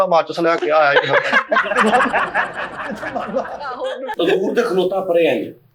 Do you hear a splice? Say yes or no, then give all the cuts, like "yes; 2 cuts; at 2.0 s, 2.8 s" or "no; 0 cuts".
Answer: yes; 1 cut; at 4.1 s